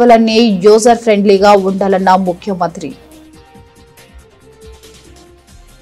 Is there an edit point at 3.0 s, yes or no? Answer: yes